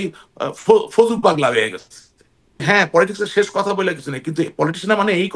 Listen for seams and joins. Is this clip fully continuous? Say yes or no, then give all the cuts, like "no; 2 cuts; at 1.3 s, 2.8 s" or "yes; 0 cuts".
no; 1 cut; at 2.6 s